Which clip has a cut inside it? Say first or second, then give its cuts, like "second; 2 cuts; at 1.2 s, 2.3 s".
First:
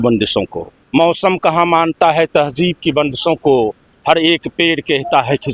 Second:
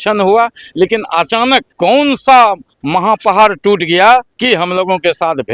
second; 2 cuts; at 1.7 s, 4.3 s